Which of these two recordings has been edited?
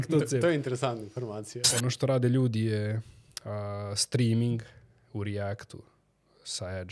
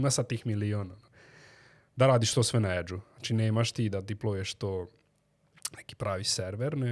first; 1 cut; at 1.6 s

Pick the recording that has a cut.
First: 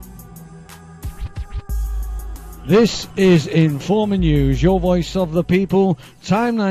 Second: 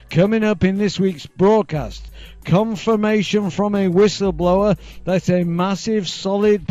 second; 1 cut; at 1.6 s

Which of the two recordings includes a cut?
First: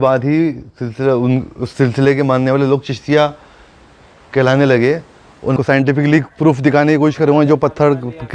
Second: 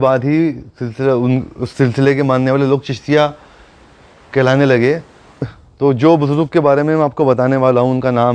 first; 1 cut; at 5.6 s

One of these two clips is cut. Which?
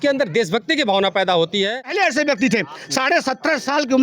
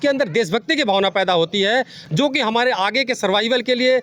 first; 1 cut; at 1.8 s

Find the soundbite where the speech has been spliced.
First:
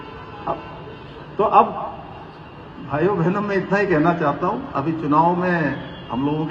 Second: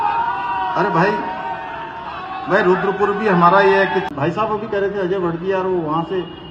second; 1 cut; at 4.1 s

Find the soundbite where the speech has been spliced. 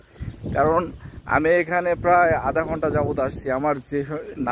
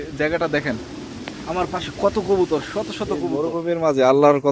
second; 1 cut; at 3.5 s

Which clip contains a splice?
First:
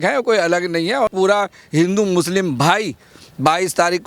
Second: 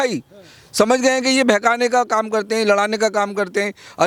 first; 1 cut; at 1.1 s

